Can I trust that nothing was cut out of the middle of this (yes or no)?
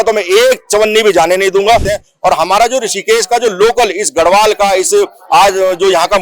no